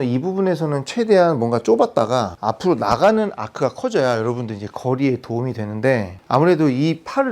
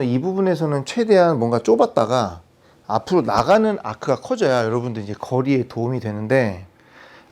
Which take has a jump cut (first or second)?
first